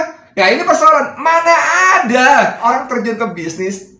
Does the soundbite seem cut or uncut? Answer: cut